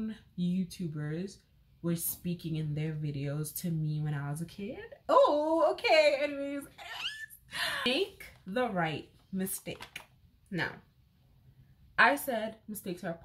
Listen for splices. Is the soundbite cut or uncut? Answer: cut